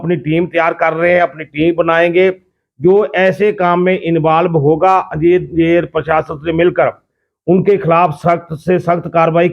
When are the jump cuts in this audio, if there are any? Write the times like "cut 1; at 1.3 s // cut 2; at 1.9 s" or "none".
none

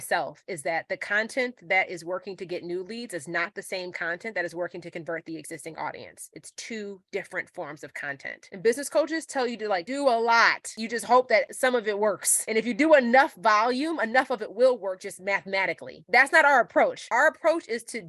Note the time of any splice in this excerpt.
cut 1; at 8.4 s

